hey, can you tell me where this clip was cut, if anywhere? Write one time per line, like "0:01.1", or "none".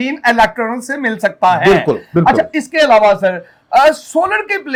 none